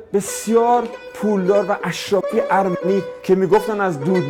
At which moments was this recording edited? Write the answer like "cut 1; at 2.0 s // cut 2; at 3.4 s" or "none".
cut 1; at 3.1 s